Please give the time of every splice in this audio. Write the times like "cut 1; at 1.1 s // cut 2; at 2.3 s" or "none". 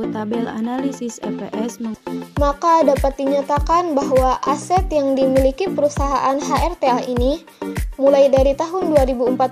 cut 1; at 1.9 s